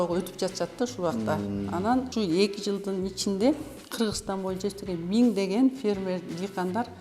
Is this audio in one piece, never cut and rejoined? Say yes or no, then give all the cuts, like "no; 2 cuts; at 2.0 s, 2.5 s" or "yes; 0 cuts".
no; 1 cut; at 2.1 s